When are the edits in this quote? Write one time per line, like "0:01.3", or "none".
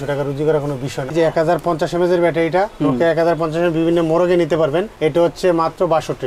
0:01.1